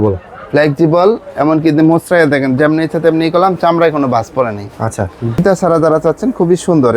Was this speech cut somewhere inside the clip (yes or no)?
yes